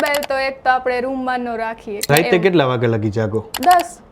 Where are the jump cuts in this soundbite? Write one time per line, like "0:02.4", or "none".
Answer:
0:02.1